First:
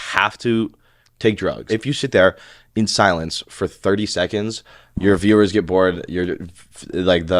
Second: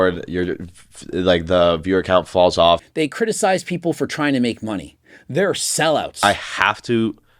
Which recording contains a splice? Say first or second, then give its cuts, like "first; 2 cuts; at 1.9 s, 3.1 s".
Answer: second; 2 cuts; at 2.8 s, 6.2 s